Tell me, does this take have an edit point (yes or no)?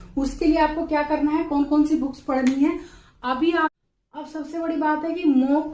yes